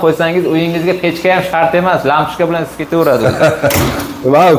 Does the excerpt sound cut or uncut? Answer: uncut